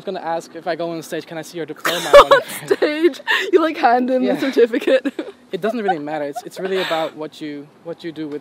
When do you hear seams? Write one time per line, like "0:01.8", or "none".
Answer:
none